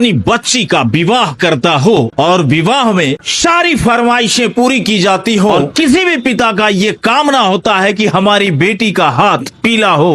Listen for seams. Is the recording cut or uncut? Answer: cut